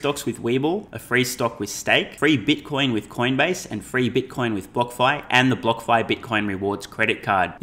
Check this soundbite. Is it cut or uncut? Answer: cut